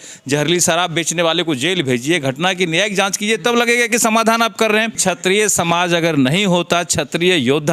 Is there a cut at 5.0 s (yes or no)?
yes